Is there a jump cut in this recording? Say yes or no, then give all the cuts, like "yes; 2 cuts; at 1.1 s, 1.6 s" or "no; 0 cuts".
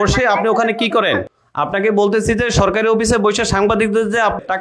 yes; 1 cut; at 1.4 s